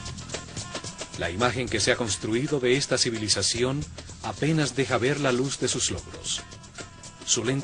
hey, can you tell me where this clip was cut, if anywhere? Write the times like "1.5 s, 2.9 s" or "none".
4.5 s